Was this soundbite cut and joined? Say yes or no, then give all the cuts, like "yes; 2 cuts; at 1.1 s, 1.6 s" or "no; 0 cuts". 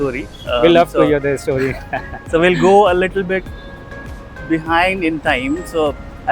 no; 0 cuts